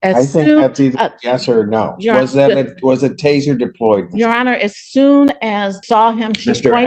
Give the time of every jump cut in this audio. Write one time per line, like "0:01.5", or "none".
0:05.7